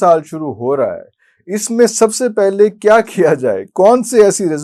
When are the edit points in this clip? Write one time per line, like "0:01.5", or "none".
none